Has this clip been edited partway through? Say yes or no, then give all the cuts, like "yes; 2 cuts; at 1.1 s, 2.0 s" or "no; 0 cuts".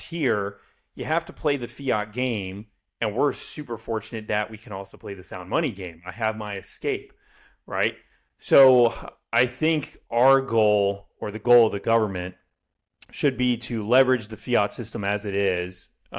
no; 0 cuts